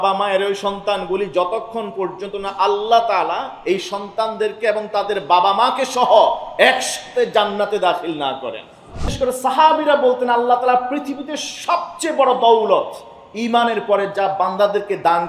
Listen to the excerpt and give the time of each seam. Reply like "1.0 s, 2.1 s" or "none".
9.1 s